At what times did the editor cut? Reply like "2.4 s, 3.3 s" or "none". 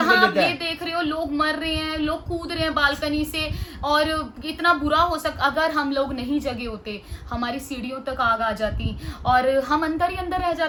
none